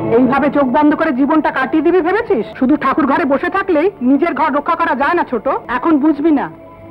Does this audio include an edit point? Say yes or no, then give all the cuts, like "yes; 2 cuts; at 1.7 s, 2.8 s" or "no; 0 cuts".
yes; 2 cuts; at 2.5 s, 5.7 s